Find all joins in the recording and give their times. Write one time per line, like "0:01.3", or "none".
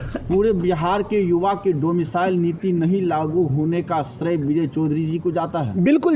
none